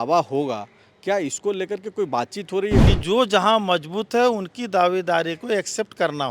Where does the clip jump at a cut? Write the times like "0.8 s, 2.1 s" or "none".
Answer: 2.9 s